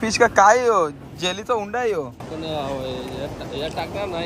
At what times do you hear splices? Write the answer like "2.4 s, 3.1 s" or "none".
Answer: 2.0 s